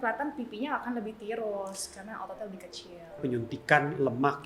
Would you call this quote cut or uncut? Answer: cut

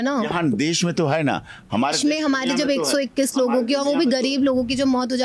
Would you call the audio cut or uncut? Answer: uncut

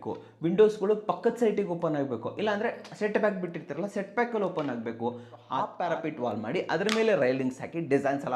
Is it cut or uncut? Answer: cut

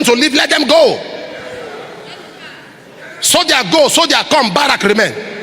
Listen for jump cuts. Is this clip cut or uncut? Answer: uncut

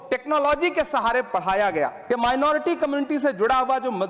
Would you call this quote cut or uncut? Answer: cut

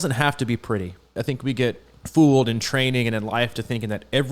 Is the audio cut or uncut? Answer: cut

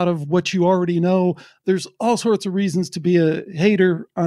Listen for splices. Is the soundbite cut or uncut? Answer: uncut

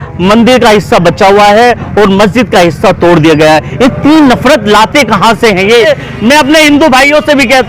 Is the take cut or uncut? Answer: cut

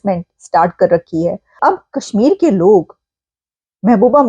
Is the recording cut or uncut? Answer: cut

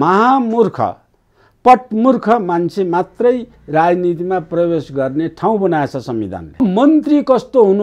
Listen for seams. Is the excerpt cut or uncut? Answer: cut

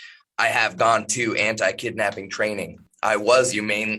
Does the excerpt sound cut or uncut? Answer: cut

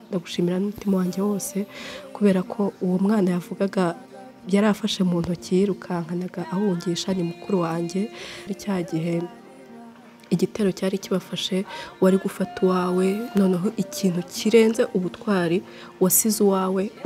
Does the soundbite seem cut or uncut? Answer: cut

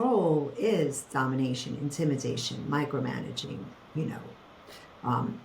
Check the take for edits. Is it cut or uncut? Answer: uncut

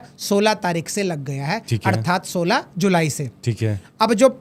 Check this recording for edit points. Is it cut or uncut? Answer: uncut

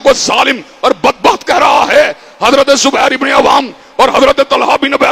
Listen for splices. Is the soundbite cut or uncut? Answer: uncut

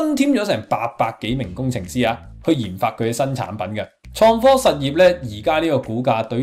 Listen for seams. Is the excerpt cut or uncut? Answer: cut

